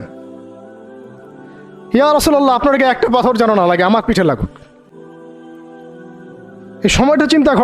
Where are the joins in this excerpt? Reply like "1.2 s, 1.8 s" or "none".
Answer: 4.8 s, 6.8 s